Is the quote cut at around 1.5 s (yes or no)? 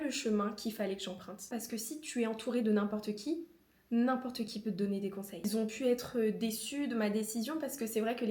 yes